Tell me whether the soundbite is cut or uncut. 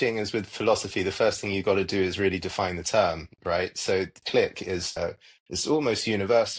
cut